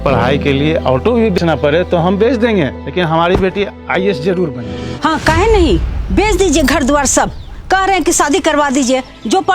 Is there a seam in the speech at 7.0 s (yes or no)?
no